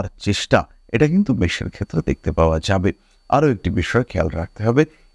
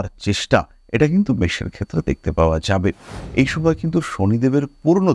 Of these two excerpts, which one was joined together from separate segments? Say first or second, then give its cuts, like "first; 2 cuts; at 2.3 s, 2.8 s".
second; 1 cut; at 3.2 s